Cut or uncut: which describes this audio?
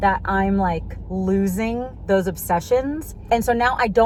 uncut